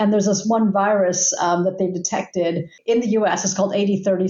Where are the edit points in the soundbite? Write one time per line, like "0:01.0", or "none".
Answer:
0:02.7